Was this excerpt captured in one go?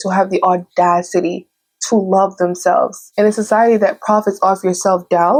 yes; 0 cuts

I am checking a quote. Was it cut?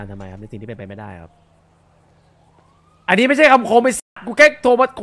no; 0 cuts

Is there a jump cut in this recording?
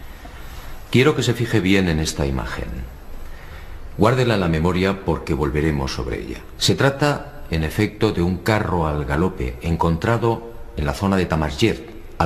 no; 0 cuts

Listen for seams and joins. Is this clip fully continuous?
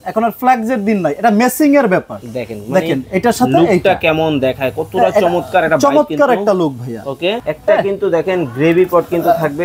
no; 1 cut; at 7.4 s

